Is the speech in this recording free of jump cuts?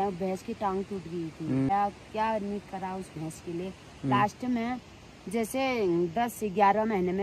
no; 1 cut; at 1.7 s

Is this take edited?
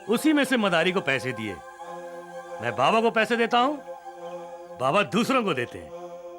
no; 0 cuts

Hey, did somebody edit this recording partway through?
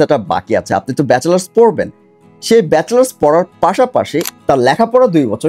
yes; 1 cut; at 4.3 s

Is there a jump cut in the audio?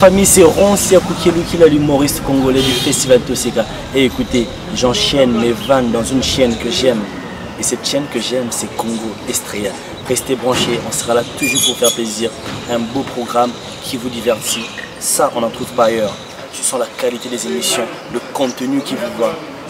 no; 0 cuts

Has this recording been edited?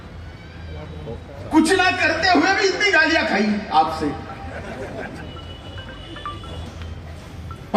yes; 1 cut; at 6.7 s

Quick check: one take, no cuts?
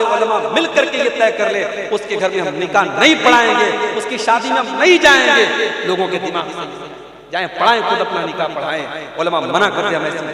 yes; 0 cuts

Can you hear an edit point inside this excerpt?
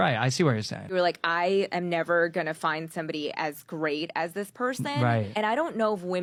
no; 0 cuts

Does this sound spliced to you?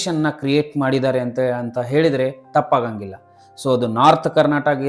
no; 0 cuts

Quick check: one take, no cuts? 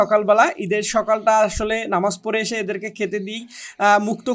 yes; 0 cuts

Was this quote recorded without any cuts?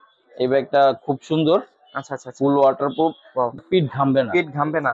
no; 1 cut; at 3.6 s

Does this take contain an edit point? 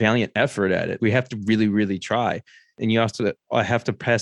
yes; 2 cuts; at 0.9 s, 2.6 s

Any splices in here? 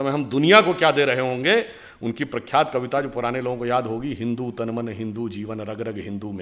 no; 0 cuts

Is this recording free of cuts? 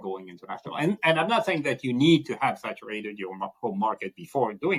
yes; 0 cuts

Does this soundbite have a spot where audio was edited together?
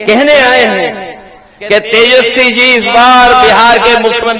no; 0 cuts

